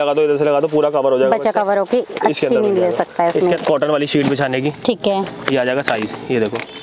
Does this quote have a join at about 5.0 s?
no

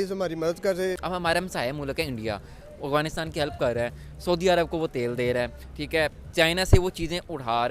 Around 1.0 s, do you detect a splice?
yes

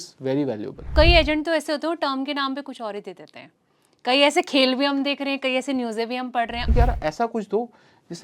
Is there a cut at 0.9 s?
yes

